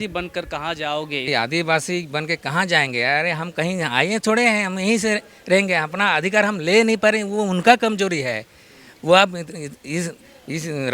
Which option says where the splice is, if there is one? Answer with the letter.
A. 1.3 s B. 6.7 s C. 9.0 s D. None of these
A